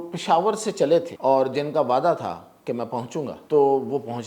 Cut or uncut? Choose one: cut